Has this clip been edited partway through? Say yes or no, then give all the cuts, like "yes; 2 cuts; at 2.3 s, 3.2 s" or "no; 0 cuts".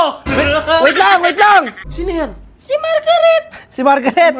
yes; 1 cut; at 1.8 s